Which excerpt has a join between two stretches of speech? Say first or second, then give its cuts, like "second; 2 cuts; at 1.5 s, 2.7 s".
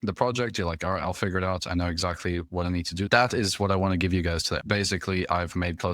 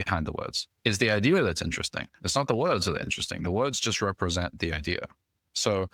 first; 2 cuts; at 3.1 s, 4.5 s